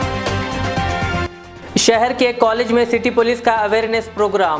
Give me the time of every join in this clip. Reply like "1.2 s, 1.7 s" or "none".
1.2 s